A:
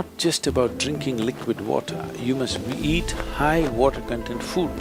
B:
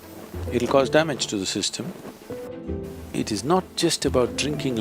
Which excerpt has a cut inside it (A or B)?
B